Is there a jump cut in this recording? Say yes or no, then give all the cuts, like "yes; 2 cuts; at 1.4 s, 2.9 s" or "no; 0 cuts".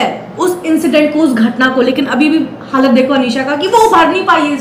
no; 0 cuts